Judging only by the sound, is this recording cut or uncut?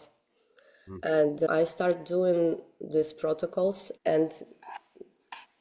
cut